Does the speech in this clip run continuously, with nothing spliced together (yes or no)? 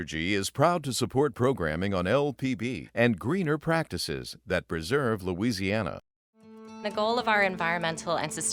yes